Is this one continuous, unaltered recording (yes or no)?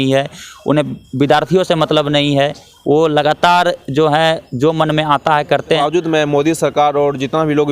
no